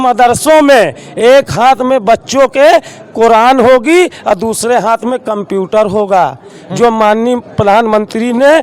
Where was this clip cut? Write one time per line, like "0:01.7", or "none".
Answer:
none

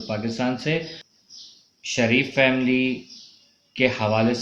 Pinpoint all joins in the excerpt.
0:01.0

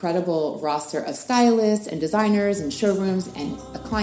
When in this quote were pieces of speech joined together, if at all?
none

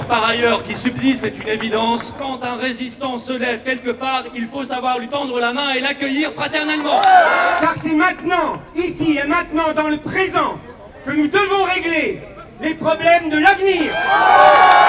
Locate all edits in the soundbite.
0:02.2
0:07.5
0:13.9

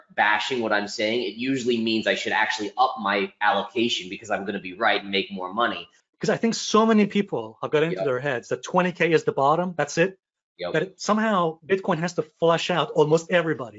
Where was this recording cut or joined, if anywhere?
0:06.0

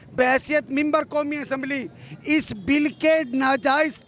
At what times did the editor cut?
none

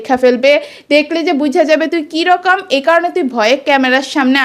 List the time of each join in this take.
none

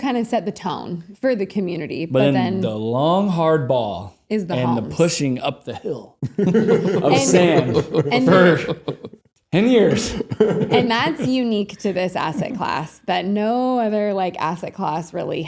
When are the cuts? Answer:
none

